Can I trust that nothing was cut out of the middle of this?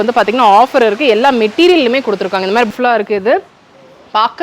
no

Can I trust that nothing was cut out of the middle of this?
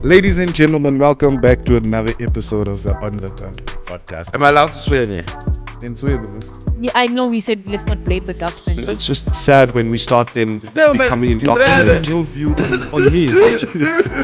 yes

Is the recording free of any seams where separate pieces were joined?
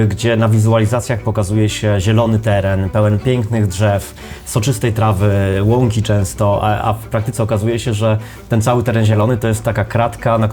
yes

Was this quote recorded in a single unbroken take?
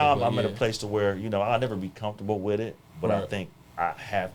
yes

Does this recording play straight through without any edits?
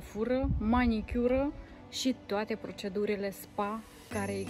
yes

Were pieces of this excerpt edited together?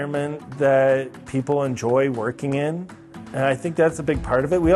no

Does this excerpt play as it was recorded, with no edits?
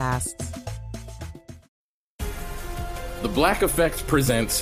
no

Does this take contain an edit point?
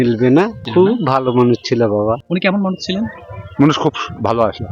no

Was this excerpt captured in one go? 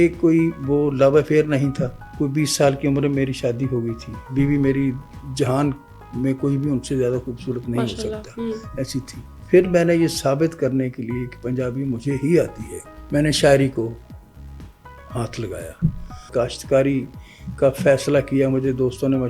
no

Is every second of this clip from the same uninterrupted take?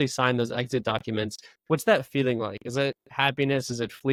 yes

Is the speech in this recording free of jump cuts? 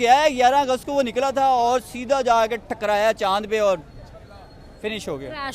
yes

